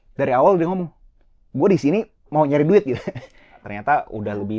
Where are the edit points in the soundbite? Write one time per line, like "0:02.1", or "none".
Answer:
0:03.7